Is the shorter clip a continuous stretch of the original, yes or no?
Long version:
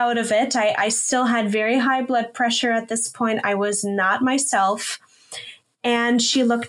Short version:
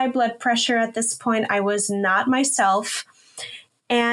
yes